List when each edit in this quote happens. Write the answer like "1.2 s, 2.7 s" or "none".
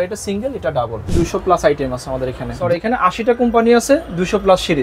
1.1 s, 2.6 s